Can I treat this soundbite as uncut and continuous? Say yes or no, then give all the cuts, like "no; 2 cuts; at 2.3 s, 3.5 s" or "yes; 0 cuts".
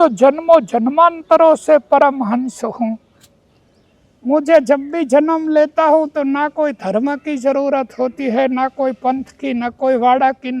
yes; 0 cuts